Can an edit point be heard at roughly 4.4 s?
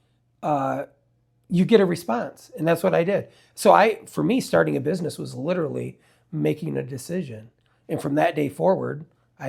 no; 0 cuts

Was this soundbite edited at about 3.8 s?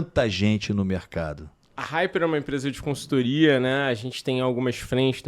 no; 1 cut; at 1.7 s

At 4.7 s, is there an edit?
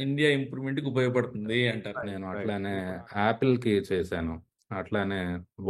no; 1 cut; at 2.2 s

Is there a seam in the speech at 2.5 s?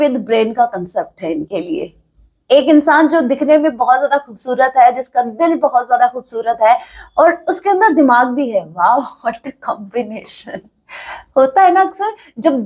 no; 0 cuts

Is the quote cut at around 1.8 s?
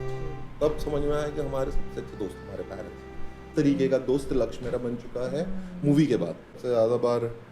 no; 2 cuts; at 3.5 s, 6.5 s

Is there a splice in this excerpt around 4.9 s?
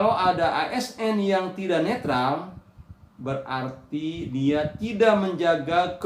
no; 0 cuts

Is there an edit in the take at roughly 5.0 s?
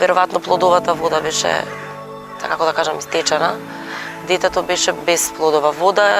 yes; 1 cut; at 5.0 s

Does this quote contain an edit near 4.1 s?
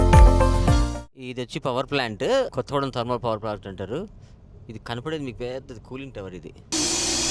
no; 0 cuts

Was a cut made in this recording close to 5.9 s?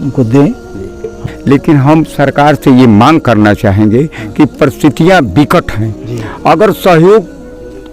no; 1 cut; at 1.1 s

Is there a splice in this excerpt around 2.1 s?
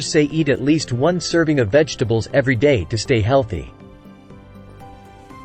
no; 1 cut; at 4.3 s

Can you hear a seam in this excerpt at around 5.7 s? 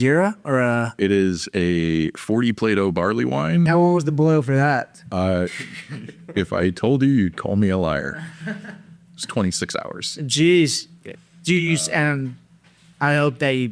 no; 2 cuts; at 1.0 s, 3.7 s

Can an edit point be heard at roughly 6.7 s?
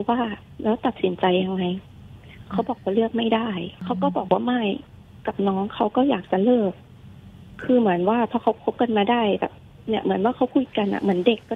no; 1 cut; at 3.8 s

